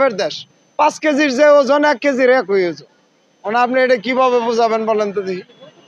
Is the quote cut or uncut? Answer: uncut